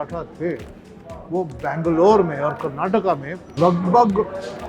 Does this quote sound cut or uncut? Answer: cut